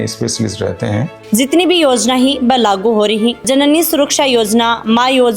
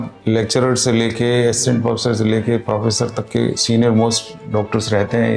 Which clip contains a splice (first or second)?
first